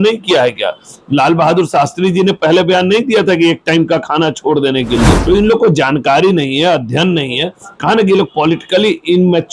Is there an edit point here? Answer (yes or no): yes